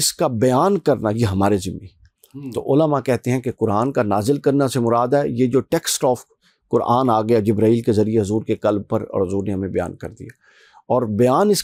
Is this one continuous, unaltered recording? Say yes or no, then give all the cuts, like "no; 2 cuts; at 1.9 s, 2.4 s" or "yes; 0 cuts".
yes; 0 cuts